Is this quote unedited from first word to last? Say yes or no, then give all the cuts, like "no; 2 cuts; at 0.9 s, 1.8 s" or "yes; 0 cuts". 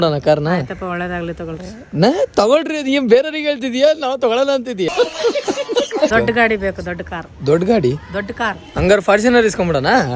no; 2 cuts; at 4.9 s, 6.1 s